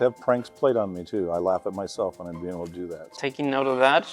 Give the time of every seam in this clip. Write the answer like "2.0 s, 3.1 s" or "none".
3.1 s